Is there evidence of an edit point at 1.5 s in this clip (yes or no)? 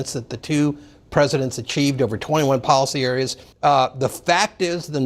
no